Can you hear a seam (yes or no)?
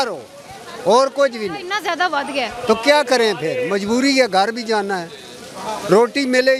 no